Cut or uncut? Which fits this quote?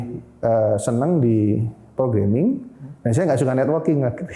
uncut